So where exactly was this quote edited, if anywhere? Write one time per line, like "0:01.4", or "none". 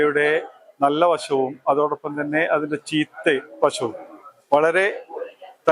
none